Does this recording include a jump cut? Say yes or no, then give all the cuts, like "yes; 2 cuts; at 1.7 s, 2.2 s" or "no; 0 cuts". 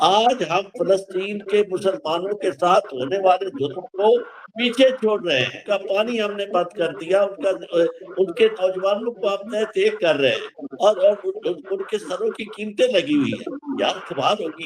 yes; 1 cut; at 5.6 s